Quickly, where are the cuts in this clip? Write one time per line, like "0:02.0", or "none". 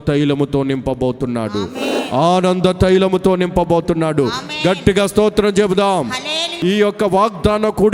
0:06.5